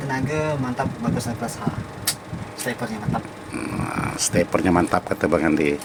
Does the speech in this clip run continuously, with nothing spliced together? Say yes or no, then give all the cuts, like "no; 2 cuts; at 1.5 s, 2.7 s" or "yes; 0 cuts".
yes; 0 cuts